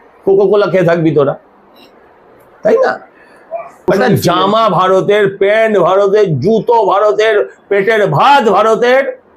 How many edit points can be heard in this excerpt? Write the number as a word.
zero